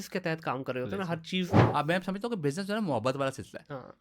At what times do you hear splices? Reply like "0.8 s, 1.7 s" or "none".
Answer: 1.6 s